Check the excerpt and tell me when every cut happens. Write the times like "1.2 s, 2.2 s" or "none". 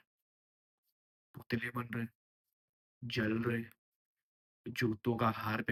none